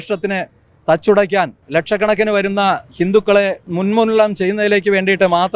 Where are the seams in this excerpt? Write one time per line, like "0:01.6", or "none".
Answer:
0:01.6
0:03.6